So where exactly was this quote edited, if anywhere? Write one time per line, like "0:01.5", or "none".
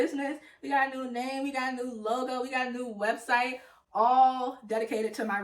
none